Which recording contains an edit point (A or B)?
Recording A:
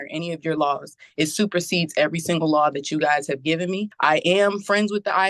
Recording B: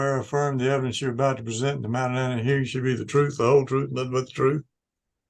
A